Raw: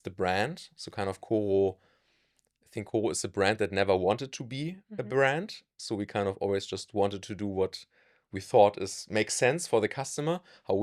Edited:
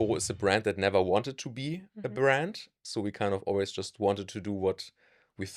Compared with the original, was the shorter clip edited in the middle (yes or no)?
no